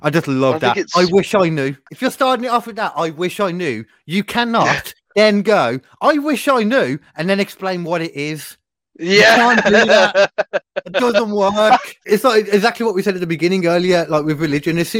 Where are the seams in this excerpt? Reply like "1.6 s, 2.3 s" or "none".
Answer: 1.8 s, 11.9 s